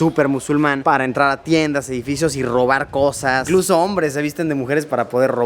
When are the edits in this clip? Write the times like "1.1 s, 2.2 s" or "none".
3.5 s